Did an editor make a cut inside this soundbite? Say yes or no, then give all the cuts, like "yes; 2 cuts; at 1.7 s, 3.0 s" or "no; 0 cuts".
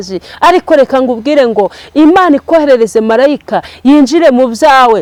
no; 0 cuts